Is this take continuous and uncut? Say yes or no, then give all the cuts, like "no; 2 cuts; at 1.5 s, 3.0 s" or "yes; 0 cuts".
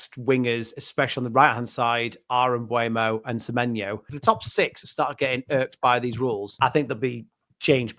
no; 2 cuts; at 4.1 s, 6.5 s